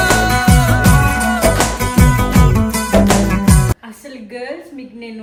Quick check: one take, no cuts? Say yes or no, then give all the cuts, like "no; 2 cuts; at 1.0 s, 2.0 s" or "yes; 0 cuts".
yes; 0 cuts